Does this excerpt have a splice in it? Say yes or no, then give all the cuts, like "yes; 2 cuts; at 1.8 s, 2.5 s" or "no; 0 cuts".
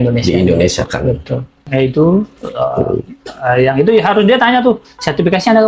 yes; 1 cut; at 1.7 s